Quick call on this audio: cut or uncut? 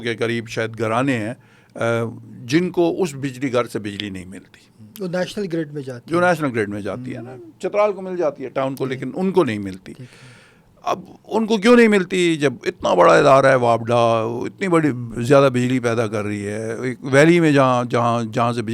uncut